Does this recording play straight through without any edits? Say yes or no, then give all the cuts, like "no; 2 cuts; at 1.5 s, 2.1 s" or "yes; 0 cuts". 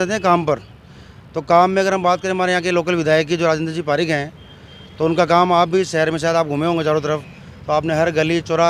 yes; 0 cuts